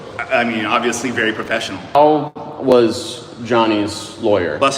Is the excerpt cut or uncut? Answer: cut